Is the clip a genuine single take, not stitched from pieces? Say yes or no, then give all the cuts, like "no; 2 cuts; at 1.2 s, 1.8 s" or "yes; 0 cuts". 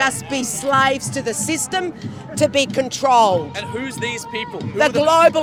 yes; 0 cuts